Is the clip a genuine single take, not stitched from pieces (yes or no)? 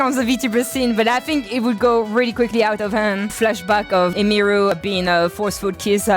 no